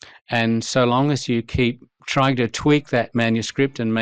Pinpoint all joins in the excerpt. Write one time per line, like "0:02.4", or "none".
0:02.0